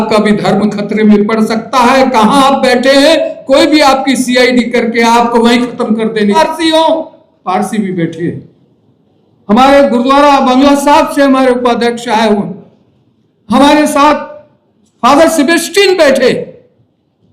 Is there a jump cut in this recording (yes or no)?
yes